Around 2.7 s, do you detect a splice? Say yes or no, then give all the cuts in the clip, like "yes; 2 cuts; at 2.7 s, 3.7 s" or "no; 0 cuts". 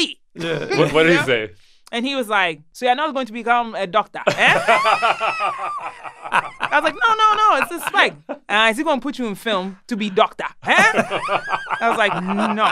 yes; 1 cut; at 2.7 s